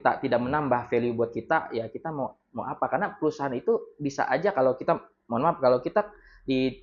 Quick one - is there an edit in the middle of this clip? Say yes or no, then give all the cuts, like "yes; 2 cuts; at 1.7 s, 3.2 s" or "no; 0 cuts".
no; 0 cuts